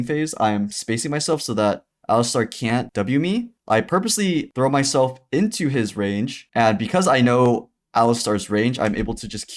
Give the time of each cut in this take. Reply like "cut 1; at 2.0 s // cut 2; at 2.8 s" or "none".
cut 1; at 2.9 s // cut 2; at 4.5 s